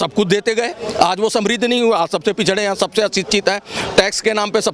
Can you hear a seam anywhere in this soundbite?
no; 0 cuts

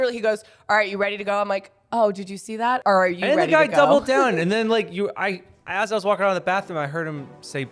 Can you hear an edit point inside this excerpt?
yes; 1 cut; at 2.8 s

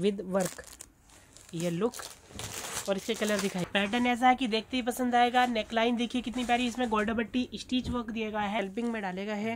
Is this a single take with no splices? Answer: no; 2 cuts; at 3.7 s, 8.6 s

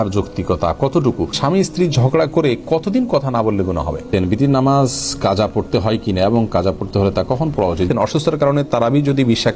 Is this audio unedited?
no; 3 cuts; at 1.4 s, 4.1 s, 7.9 s

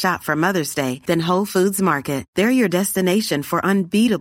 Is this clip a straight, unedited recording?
yes; 0 cuts

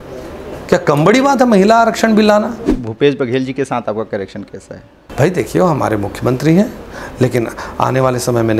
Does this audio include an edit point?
yes; 2 cuts; at 2.7 s, 5.0 s

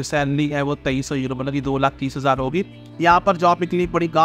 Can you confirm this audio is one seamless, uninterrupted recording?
no; 1 cut; at 2.8 s

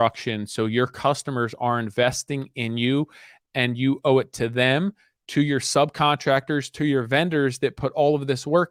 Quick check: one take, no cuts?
yes; 0 cuts

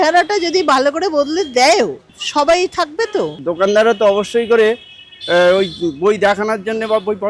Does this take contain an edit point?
yes; 1 cut; at 3.4 s

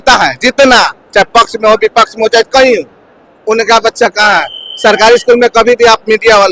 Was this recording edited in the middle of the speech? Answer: no; 0 cuts

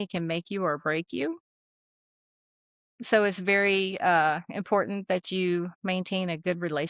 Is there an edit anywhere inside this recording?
no; 0 cuts

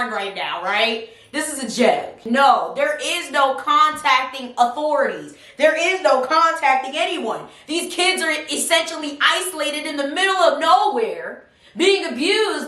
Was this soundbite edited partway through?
no; 0 cuts

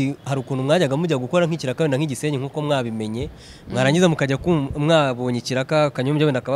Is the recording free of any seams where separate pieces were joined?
yes; 0 cuts

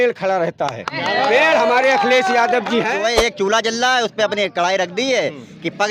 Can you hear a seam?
yes; 1 cut; at 3.0 s

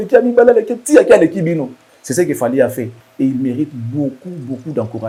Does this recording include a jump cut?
no; 0 cuts

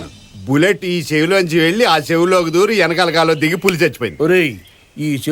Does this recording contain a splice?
no; 0 cuts

